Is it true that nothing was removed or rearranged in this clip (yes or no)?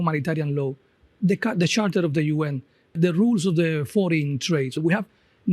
no